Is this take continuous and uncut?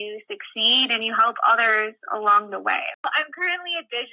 no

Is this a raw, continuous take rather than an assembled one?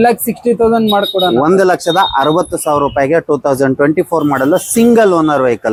yes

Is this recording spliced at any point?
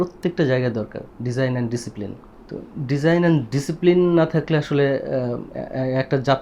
no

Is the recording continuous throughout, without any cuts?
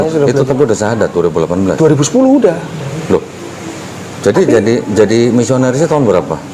yes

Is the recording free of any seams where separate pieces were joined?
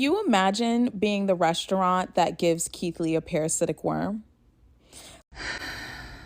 no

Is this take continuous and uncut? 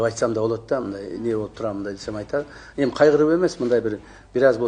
yes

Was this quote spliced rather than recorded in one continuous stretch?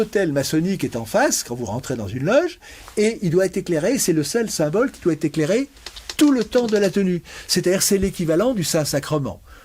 no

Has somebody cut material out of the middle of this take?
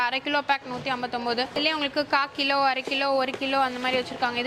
no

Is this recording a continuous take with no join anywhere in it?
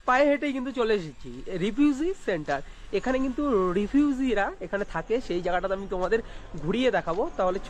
yes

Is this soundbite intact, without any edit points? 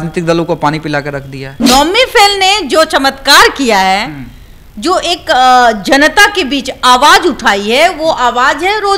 no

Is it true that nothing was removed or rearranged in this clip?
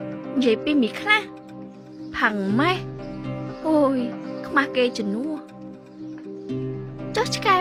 yes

